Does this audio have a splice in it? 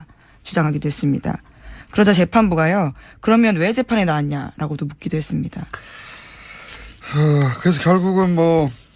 yes; 1 cut; at 2.3 s

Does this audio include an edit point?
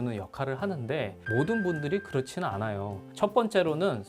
yes; 2 cuts; at 1.2 s, 3.0 s

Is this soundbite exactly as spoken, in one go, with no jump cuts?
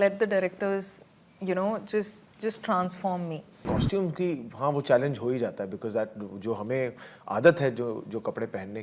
no; 1 cut; at 3.6 s

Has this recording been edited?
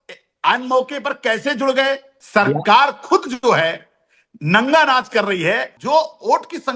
yes; 2 cuts; at 2.1 s, 5.7 s

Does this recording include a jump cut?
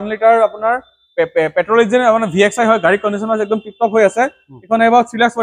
no; 0 cuts

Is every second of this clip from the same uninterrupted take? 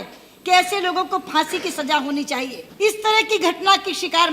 no; 1 cut; at 2.6 s

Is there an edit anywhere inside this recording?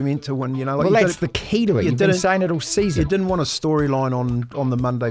no; 0 cuts

